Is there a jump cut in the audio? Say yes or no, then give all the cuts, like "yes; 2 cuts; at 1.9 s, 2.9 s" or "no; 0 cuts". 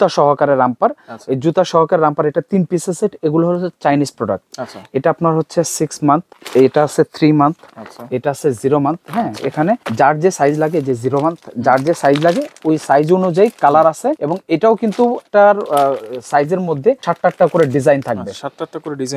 no; 0 cuts